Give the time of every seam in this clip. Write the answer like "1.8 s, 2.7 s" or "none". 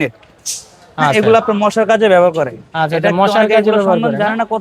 none